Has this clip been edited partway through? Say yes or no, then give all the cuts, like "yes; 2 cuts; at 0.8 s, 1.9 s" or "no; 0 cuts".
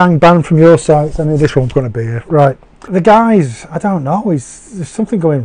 no; 0 cuts